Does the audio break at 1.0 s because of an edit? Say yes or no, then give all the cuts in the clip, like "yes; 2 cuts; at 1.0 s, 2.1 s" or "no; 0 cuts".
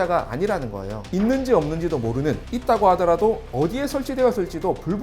yes; 1 cut; at 1.0 s